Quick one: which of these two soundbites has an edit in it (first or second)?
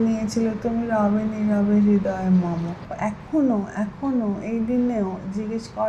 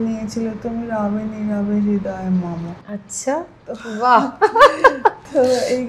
first